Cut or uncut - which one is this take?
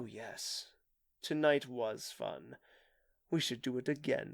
uncut